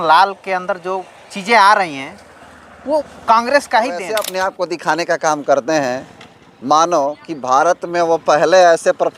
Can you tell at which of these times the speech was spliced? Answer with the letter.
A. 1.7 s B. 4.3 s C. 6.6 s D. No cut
B